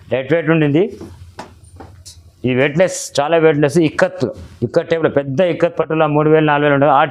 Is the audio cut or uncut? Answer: uncut